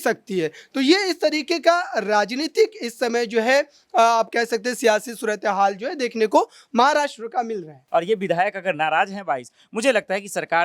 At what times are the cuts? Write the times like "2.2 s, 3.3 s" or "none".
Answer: 7.7 s